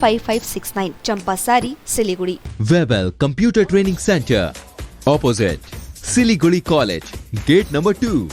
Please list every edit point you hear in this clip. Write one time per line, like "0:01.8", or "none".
0:02.5